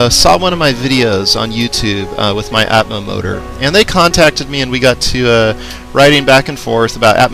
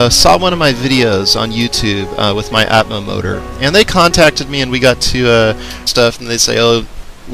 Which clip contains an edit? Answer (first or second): first